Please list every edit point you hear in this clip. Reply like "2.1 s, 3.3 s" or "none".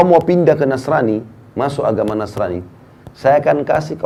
none

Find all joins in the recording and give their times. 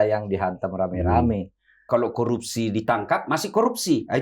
1.9 s

